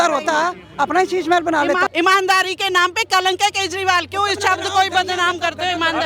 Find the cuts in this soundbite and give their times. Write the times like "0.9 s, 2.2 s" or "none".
1.9 s